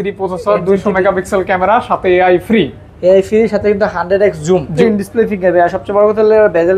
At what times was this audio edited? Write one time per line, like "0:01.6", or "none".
0:04.7